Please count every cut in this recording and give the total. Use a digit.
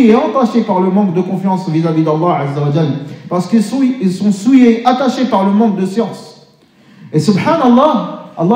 0